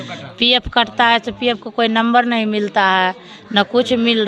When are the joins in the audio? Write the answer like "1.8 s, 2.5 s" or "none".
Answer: none

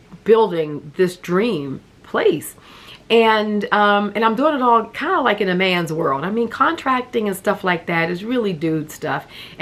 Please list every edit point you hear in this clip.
none

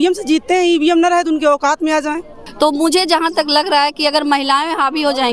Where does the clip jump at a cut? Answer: 2.4 s

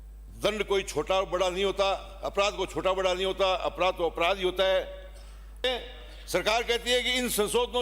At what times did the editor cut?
5.6 s

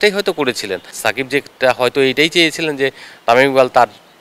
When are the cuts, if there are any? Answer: 0.9 s

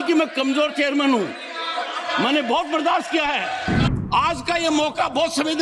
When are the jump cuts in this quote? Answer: 3.8 s

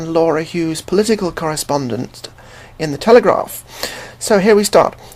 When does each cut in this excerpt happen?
1.6 s

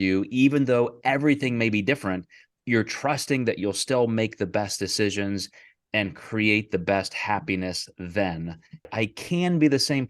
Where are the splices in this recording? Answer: 8.9 s

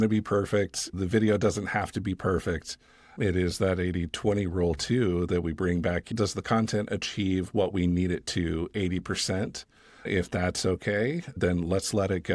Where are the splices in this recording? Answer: 1.0 s, 6.1 s

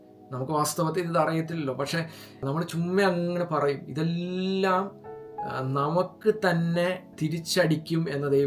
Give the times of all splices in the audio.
none

